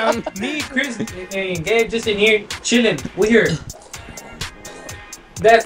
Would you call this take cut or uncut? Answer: uncut